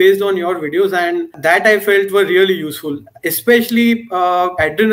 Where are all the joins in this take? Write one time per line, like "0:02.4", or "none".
0:01.4